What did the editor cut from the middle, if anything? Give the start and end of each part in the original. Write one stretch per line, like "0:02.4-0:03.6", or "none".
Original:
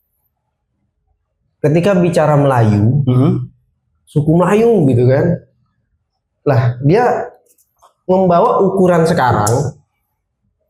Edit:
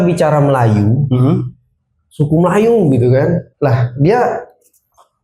0:05.4-0:06.3